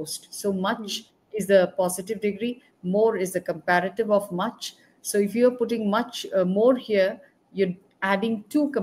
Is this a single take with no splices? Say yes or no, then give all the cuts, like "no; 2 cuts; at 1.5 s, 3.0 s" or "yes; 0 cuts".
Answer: yes; 0 cuts